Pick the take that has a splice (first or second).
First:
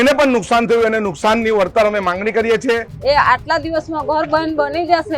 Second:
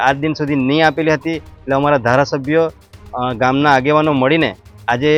first